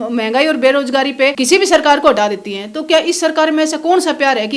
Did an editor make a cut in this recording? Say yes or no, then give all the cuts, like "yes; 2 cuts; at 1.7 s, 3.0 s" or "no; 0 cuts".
yes; 1 cut; at 1.4 s